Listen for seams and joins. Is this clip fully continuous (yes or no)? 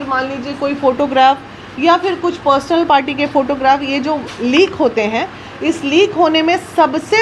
yes